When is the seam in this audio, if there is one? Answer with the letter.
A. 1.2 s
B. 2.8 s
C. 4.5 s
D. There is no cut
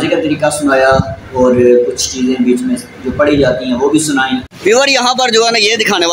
C